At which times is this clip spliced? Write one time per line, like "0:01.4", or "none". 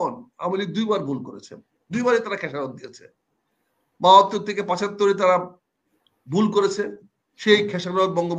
none